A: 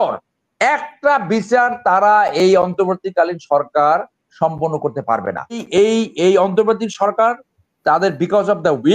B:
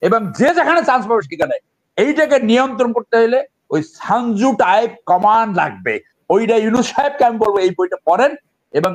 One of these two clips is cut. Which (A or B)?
A